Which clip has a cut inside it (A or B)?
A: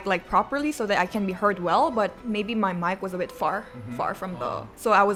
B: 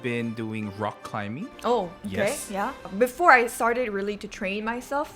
B